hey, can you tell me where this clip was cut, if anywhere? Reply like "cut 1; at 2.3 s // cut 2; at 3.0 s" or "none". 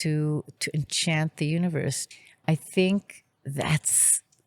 cut 1; at 2.1 s